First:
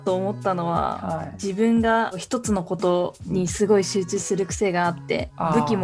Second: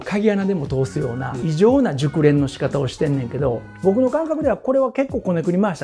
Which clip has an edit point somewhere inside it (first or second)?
second